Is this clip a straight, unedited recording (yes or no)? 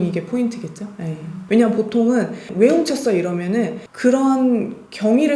no